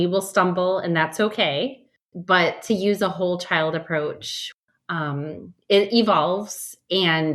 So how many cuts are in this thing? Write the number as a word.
two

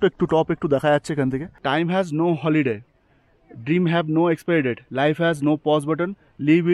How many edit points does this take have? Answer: one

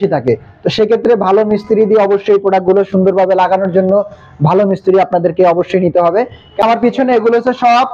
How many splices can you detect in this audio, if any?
one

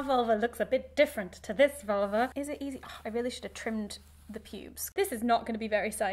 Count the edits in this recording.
two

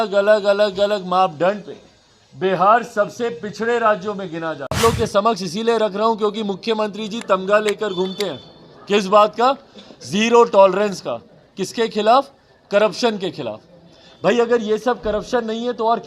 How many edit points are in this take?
one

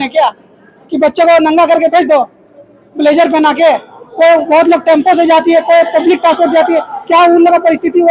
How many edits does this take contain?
zero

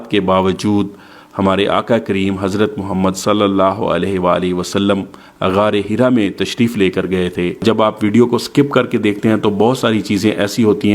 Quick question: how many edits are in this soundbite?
one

